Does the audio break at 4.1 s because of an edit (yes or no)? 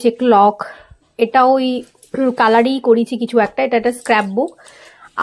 no